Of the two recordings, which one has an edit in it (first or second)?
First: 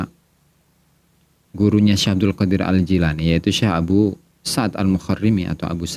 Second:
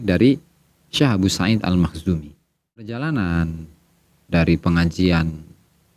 second